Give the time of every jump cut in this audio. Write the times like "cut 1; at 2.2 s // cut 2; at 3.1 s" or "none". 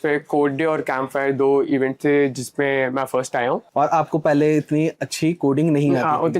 cut 1; at 3.7 s